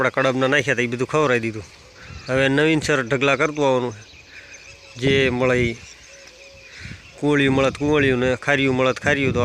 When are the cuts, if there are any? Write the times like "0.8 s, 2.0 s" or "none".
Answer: none